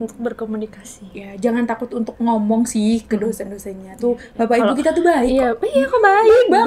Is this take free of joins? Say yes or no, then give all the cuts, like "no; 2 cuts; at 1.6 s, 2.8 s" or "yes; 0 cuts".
yes; 0 cuts